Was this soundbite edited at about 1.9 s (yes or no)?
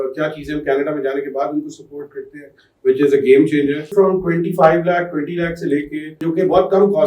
no